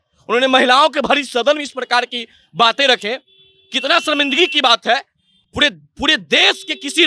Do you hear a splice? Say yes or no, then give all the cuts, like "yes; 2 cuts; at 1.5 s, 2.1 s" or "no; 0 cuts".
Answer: no; 0 cuts